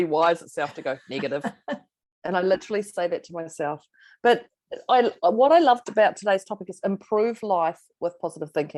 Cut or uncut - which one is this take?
uncut